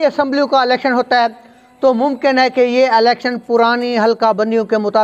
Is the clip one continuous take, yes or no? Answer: yes